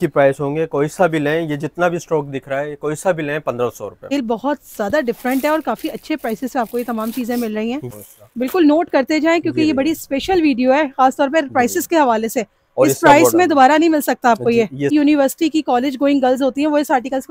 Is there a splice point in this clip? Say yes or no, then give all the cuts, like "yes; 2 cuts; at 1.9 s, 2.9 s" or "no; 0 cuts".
yes; 3 cuts; at 4.1 s, 7.8 s, 14.9 s